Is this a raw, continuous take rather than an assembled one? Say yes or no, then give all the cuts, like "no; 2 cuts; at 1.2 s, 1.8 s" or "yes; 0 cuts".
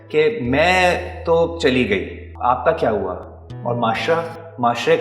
no; 1 cut; at 2.2 s